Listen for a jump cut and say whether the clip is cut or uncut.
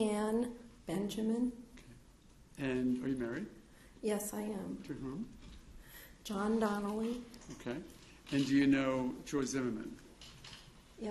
cut